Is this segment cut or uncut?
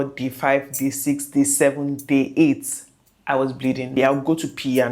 cut